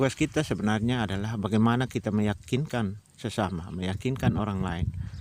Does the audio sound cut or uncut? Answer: uncut